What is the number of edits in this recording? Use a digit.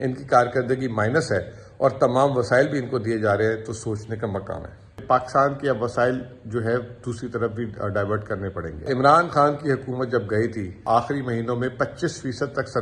3